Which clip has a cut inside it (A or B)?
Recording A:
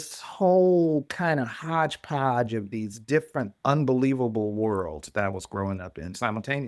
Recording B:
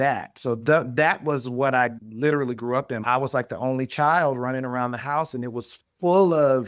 B